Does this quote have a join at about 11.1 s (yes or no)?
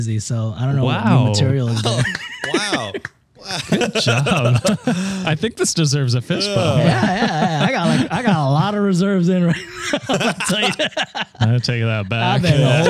no